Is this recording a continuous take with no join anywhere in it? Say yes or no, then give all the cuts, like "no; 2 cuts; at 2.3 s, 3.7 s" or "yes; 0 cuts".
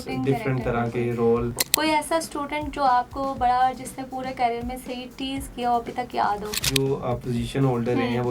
no; 2 cuts; at 1.5 s, 6.7 s